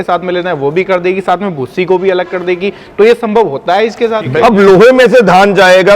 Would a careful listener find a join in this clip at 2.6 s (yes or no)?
no